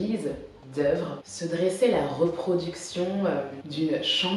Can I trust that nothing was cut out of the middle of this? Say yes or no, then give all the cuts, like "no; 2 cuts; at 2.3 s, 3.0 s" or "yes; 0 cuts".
yes; 0 cuts